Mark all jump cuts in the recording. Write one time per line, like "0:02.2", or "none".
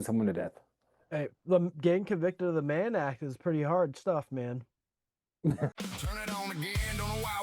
0:05.8